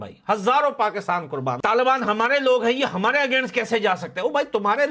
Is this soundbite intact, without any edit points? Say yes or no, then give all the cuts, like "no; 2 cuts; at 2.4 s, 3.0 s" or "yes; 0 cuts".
no; 1 cut; at 1.6 s